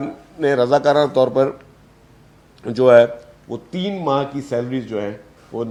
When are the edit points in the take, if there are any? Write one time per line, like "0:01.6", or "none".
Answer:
none